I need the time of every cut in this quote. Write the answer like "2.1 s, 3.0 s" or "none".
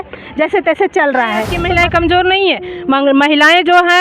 1.6 s

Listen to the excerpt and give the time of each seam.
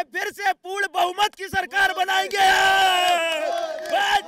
none

